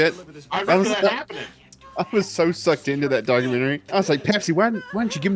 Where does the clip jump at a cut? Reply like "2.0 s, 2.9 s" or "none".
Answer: 3.8 s